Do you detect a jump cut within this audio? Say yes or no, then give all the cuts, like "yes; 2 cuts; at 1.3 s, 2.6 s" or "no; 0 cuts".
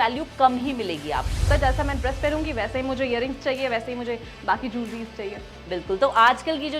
yes; 1 cut; at 1.5 s